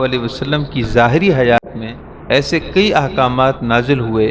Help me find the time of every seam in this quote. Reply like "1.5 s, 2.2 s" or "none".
1.6 s